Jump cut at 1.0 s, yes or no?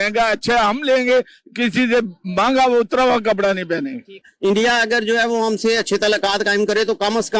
no